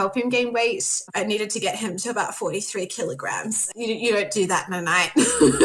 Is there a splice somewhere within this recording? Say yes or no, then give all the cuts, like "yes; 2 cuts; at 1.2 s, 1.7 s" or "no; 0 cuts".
yes; 2 cuts; at 0.9 s, 3.7 s